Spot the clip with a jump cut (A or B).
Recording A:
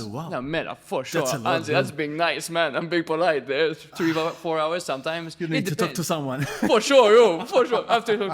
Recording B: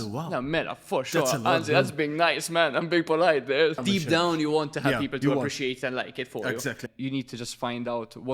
B